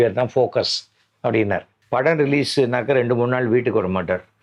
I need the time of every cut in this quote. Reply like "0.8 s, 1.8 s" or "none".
1.7 s